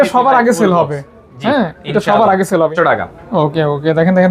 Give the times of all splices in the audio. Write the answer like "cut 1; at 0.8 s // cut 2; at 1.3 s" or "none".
cut 1; at 2.7 s